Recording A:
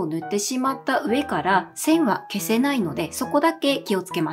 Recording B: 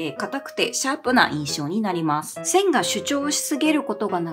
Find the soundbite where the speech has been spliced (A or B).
B